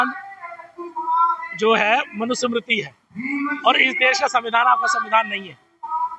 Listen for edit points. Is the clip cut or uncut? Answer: uncut